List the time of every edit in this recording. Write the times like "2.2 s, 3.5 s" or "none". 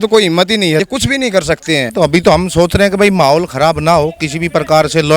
1.9 s